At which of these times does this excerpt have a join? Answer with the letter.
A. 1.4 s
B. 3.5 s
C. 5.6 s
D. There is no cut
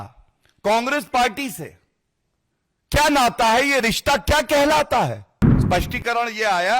C